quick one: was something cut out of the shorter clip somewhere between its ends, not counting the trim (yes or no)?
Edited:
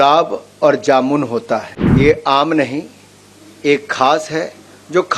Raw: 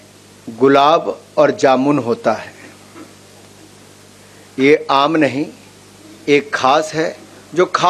yes